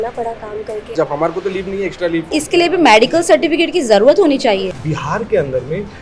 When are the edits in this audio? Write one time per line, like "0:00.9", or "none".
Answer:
0:00.9
0:02.3
0:04.8